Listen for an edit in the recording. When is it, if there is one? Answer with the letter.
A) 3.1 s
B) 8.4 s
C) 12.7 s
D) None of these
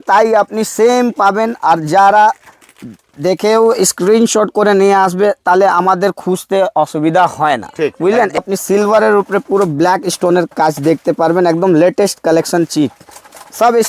B